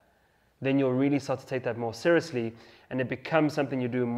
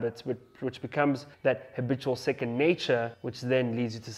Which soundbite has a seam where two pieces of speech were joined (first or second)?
second